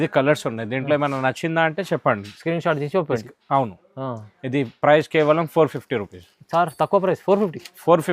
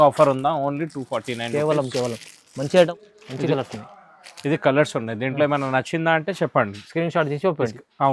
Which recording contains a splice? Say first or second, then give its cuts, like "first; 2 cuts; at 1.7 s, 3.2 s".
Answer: second; 1 cut; at 2.9 s